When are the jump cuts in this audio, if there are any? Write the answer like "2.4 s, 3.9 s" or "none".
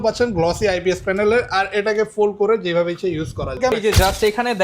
3.7 s